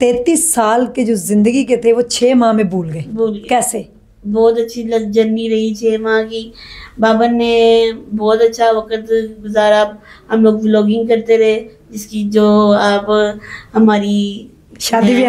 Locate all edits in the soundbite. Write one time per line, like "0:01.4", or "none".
none